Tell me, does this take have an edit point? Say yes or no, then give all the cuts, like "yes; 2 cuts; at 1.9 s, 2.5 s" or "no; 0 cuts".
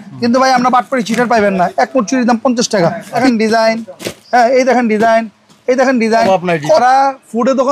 yes; 2 cuts; at 3.2 s, 6.8 s